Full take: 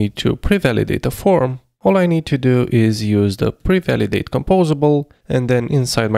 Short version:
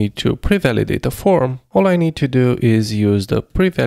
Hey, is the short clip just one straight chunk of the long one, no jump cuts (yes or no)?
no